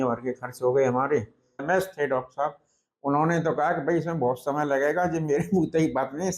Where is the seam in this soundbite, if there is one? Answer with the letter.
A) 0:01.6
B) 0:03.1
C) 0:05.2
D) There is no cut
A